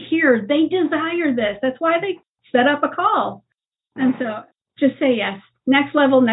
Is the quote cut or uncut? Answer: cut